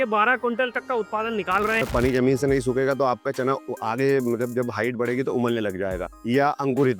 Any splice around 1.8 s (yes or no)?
yes